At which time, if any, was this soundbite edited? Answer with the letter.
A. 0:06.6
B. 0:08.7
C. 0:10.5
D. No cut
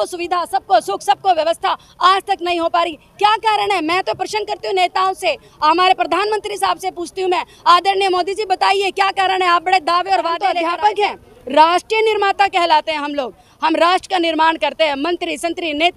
C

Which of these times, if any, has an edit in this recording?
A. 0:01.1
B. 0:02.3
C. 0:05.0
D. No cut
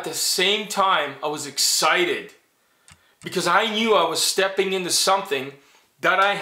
D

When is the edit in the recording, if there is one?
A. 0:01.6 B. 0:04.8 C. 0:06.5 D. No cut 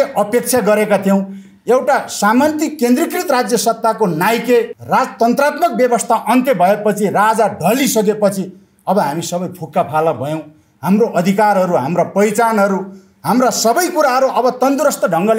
B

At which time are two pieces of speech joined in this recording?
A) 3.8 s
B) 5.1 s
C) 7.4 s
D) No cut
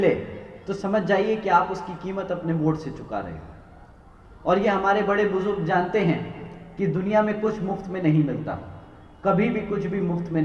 D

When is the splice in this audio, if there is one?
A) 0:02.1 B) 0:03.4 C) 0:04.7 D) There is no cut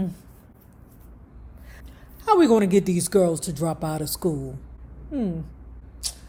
D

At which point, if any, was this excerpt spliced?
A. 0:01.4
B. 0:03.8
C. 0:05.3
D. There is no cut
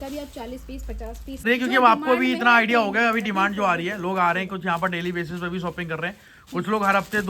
A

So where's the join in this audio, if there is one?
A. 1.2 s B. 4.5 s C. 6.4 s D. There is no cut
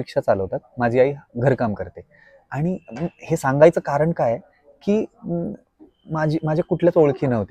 D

